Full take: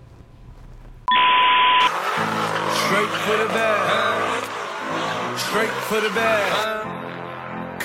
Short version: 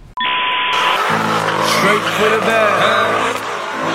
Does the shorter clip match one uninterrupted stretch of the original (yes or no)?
no